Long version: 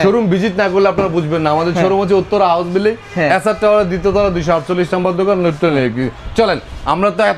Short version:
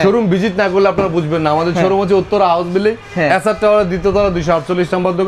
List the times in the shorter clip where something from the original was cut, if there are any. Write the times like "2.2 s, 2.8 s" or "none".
none